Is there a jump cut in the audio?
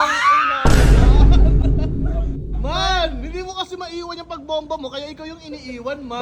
no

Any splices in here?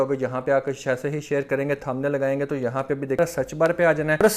yes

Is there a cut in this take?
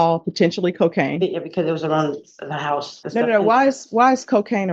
yes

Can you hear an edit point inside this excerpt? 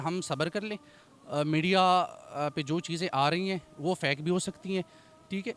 no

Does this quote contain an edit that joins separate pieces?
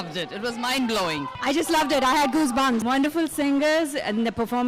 yes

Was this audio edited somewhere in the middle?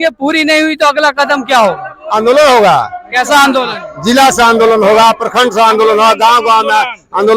no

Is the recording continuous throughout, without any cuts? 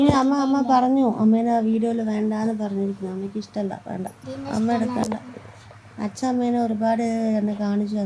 no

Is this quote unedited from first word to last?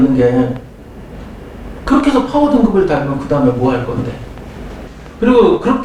no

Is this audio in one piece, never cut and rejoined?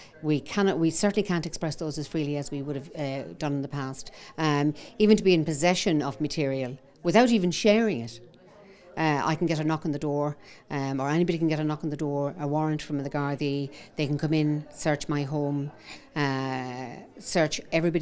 yes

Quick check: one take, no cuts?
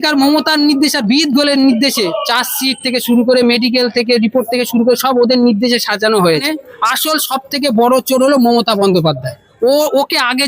no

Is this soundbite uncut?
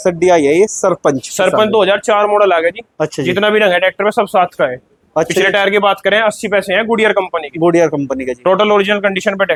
yes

